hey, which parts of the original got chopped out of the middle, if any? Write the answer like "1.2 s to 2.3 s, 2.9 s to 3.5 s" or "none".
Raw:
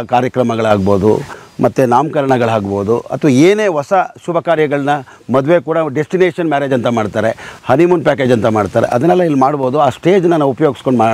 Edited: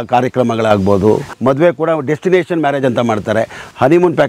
1.3 s to 5.2 s

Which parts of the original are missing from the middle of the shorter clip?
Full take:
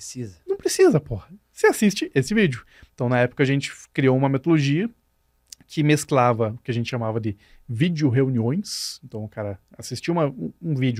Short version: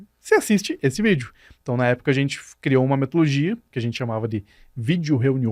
5.0 s to 6.6 s

